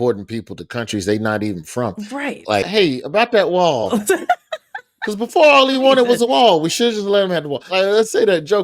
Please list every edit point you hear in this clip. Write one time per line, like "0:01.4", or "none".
0:07.7